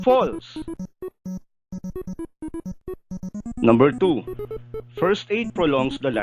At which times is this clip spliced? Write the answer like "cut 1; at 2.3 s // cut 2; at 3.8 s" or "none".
cut 1; at 1.5 s